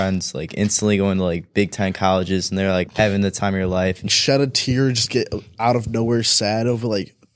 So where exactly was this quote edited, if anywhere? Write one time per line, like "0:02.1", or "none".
0:04.0